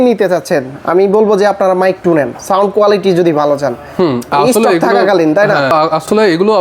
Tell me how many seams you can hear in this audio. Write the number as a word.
zero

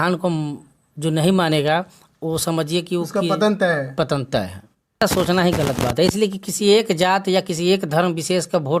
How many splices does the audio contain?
one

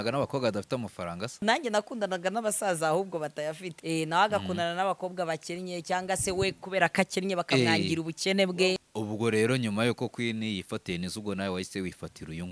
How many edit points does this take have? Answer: three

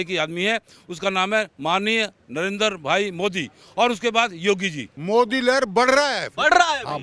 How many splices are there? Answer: one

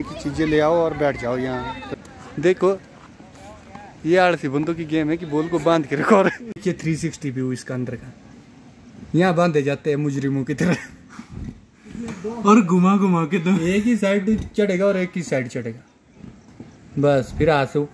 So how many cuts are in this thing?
two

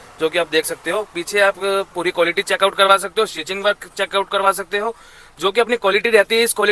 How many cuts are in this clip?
zero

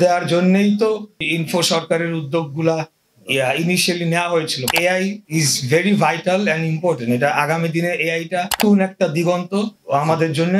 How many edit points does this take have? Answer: four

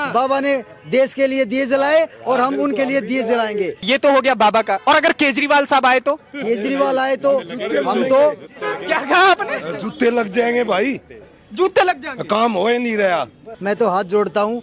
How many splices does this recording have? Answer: two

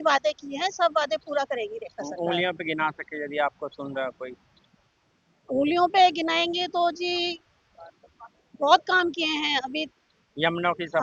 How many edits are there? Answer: zero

